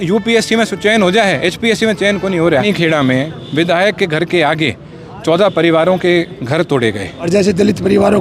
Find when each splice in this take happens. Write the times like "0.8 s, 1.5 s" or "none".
2.6 s, 7.3 s